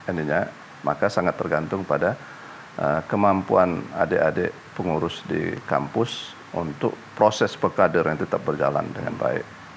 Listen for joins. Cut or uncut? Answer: uncut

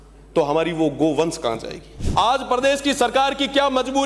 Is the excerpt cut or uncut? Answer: cut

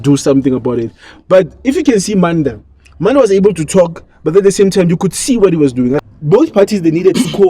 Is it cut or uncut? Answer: cut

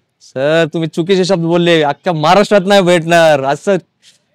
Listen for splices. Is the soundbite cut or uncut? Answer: uncut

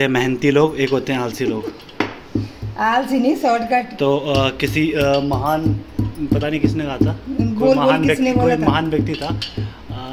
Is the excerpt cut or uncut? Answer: uncut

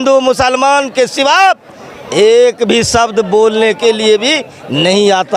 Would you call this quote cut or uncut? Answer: uncut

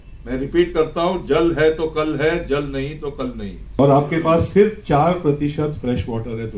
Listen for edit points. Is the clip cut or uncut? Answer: cut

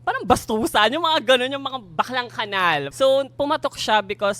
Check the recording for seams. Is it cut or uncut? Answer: cut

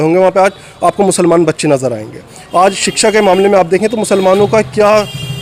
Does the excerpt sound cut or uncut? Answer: uncut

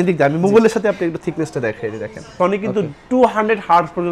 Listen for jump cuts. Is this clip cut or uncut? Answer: cut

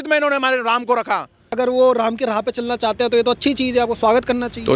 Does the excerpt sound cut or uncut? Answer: cut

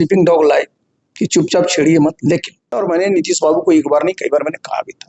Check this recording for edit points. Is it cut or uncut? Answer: cut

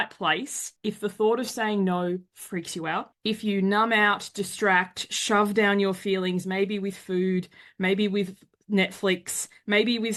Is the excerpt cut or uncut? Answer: uncut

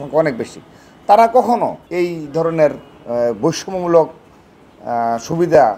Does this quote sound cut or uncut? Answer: cut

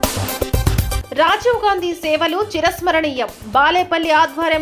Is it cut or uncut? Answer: cut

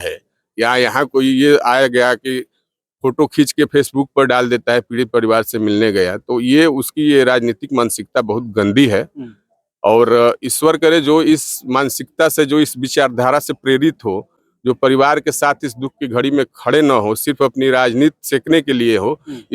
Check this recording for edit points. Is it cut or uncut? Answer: uncut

